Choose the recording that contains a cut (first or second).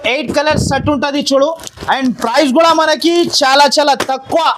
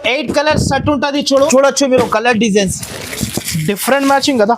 second